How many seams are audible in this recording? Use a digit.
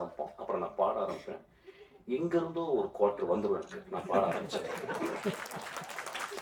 0